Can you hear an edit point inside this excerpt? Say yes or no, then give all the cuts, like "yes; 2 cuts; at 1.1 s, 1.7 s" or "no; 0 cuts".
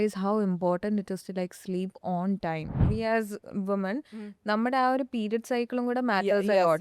yes; 1 cut; at 2.8 s